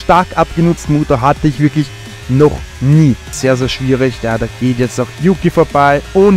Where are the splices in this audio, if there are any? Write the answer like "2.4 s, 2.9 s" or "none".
3.3 s